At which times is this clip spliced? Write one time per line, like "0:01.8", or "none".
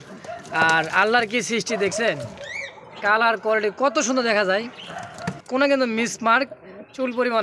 0:05.4